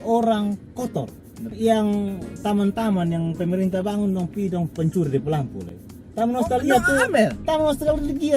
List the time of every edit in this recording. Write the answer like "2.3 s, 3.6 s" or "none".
1.5 s